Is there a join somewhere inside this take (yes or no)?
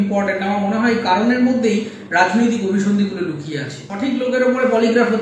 yes